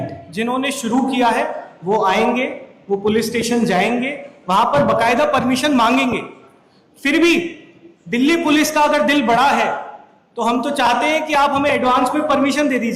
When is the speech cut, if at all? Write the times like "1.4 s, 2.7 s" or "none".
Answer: none